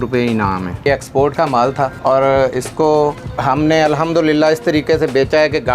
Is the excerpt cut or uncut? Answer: cut